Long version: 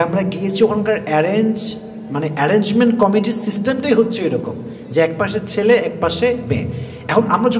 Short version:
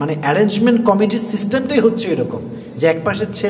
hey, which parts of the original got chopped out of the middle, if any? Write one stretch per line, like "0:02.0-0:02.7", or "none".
none